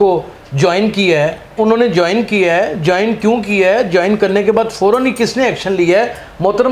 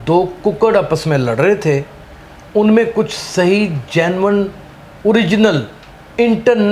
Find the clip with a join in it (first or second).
first